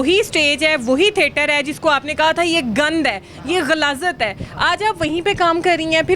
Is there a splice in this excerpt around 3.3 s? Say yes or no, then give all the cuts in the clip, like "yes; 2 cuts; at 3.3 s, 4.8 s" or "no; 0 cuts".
no; 0 cuts